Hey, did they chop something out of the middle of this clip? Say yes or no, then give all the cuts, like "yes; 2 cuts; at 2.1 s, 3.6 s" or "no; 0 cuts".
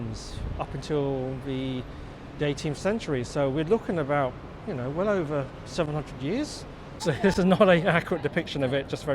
yes; 1 cut; at 7.0 s